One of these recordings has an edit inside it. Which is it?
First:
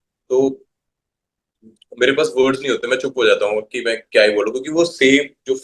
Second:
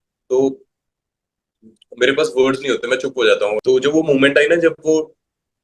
second; 1 cut; at 3.6 s

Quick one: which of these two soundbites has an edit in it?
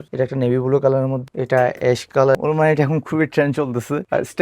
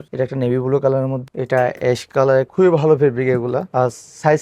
first; 1 cut; at 2.3 s

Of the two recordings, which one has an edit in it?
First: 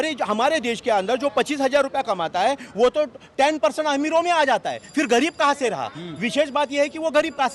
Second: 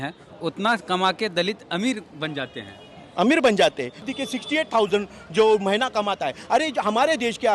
second; 1 cut; at 4.0 s

